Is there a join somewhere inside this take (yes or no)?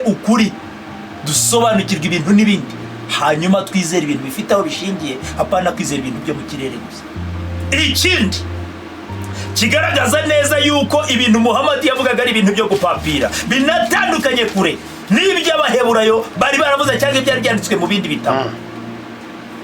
yes